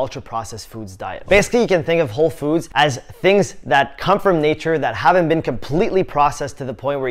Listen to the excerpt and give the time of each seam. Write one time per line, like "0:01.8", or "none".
0:01.2